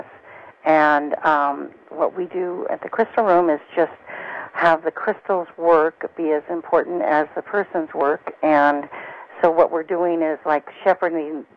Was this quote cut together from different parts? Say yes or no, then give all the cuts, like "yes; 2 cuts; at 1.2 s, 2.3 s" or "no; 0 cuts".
no; 0 cuts